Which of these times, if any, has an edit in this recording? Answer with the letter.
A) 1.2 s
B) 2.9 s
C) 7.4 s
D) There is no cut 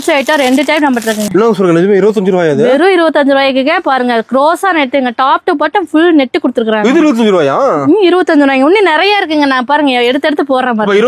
A